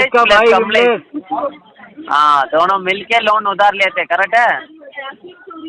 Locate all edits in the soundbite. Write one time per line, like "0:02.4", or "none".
none